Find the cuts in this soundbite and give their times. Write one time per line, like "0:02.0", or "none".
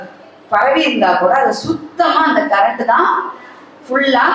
none

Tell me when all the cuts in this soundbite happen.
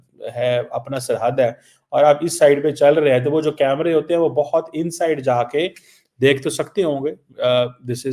none

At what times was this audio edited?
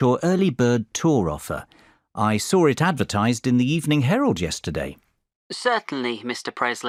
none

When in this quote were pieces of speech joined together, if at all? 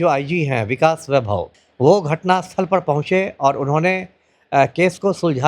0:01.6

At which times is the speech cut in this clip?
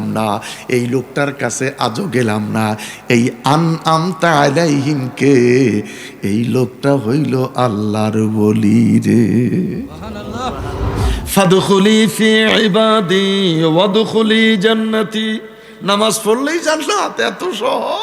0:11.0

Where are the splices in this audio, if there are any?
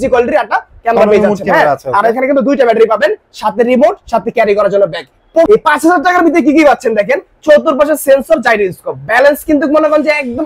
0:05.5

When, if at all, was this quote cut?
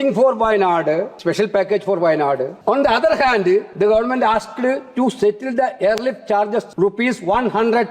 0:01.1
0:02.5
0:03.7
0:06.7

